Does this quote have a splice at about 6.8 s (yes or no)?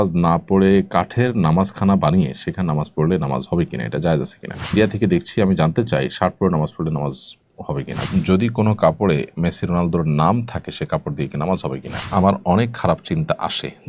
no